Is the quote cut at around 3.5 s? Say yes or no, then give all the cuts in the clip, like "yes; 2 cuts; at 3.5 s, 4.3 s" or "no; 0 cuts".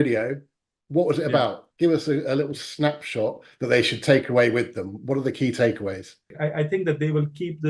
no; 1 cut; at 6.3 s